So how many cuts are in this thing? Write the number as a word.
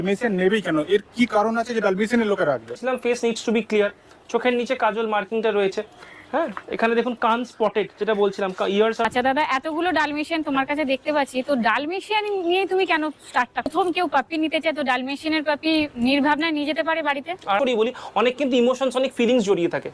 four